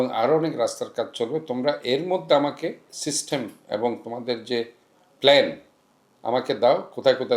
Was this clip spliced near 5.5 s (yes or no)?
no